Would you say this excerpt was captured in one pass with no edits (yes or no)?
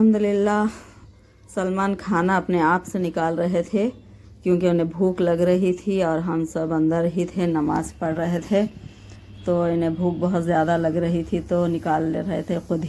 yes